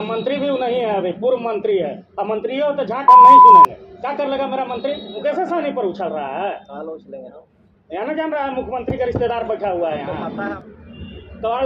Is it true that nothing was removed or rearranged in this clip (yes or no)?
no